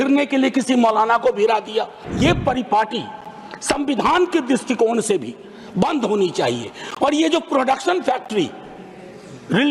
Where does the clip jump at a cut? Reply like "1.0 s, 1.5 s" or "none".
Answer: 2.1 s

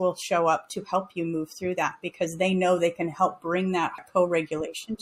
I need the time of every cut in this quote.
4.0 s

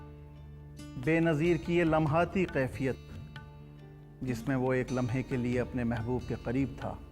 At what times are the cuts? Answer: 0.9 s

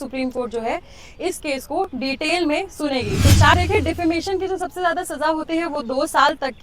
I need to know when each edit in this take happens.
3.5 s

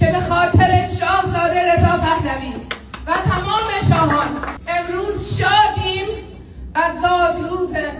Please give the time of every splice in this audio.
none

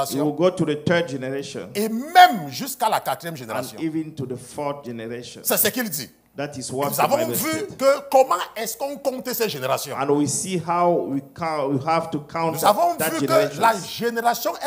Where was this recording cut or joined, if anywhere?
none

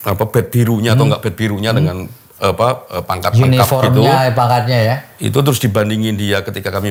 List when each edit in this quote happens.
none

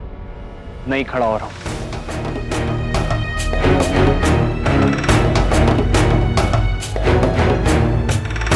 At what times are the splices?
none

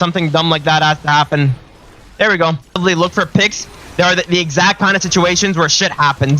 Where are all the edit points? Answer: 2.8 s

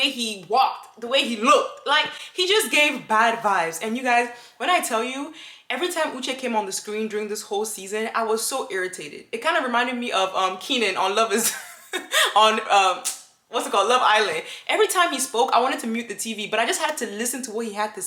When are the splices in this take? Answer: none

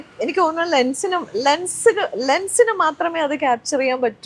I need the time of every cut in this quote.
none

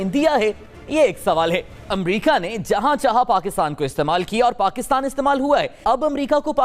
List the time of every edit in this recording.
1.9 s, 5.8 s

